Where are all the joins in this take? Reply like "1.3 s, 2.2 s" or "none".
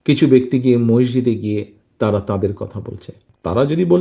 none